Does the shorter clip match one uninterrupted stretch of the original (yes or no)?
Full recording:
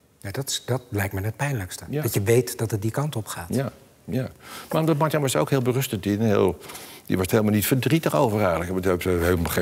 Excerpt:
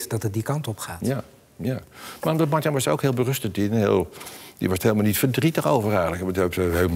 yes